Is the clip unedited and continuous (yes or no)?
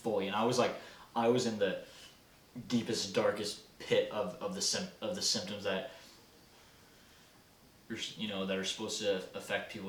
yes